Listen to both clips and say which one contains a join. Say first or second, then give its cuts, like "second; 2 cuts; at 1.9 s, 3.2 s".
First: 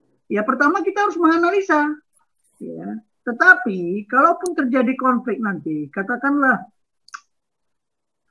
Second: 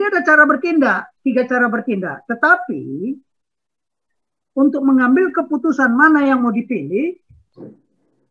first; 1 cut; at 2.1 s